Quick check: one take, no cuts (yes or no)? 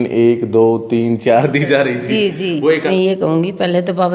no